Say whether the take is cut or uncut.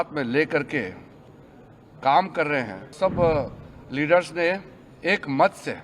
cut